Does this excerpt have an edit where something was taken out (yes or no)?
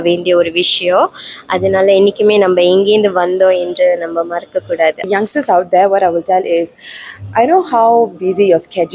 yes